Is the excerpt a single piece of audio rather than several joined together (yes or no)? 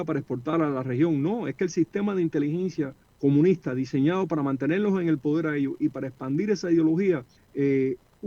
no